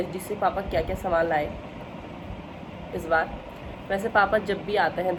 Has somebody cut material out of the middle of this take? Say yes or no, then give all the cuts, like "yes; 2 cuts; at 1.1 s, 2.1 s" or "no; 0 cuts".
no; 0 cuts